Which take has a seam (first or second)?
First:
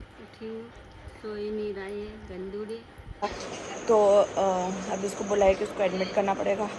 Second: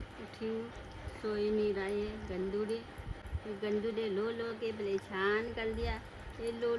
first